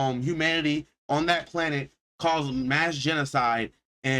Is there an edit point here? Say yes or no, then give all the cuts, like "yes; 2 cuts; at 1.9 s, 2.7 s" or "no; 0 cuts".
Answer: yes; 1 cut; at 1.9 s